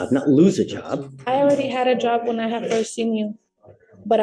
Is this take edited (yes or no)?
no